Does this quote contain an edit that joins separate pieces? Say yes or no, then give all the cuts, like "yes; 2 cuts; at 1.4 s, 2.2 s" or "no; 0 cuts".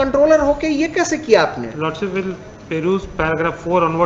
no; 0 cuts